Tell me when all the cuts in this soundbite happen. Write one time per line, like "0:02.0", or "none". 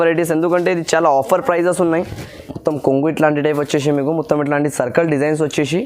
0:02.4